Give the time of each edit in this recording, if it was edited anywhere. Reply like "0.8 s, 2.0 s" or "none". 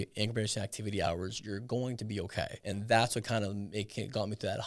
2.6 s